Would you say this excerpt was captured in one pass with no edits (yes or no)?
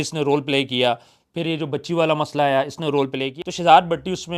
no